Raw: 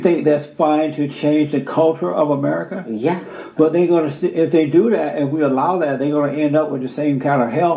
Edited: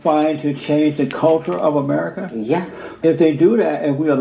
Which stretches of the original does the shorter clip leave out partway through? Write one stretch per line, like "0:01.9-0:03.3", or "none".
0:03.5-0:04.3